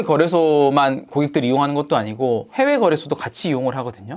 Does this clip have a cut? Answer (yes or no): no